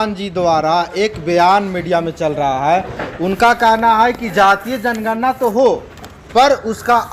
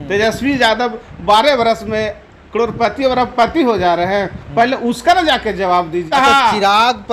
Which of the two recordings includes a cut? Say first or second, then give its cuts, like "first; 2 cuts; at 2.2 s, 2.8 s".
second; 1 cut; at 6.1 s